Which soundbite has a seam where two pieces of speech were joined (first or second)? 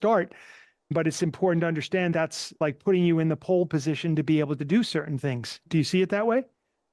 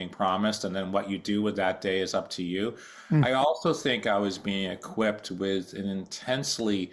first